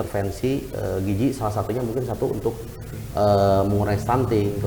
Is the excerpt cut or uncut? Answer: uncut